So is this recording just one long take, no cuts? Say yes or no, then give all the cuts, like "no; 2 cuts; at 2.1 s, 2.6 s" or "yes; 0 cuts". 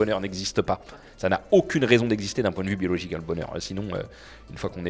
yes; 0 cuts